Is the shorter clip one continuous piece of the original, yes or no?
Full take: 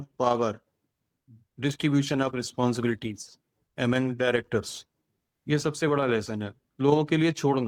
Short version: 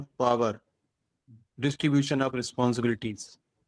yes